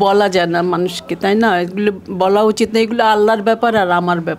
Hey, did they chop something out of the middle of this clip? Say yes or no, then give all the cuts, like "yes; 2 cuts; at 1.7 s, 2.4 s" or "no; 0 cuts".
no; 0 cuts